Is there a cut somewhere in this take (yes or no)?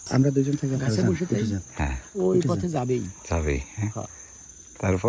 no